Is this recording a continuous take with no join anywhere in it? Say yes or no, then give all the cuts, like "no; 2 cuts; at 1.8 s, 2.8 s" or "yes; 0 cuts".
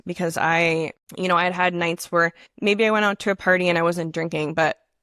no; 2 cuts; at 1.0 s, 2.4 s